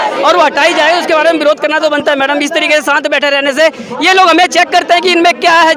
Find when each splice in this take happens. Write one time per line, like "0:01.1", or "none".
none